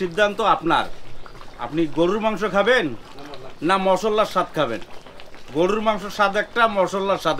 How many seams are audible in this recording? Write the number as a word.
zero